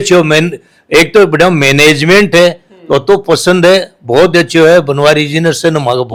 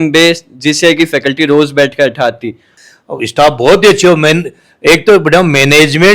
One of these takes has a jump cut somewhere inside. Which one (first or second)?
second